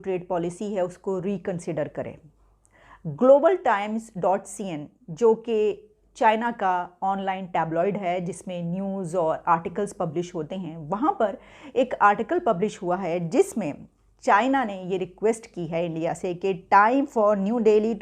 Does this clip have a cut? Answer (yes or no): no